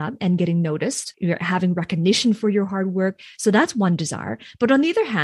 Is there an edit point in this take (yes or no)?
yes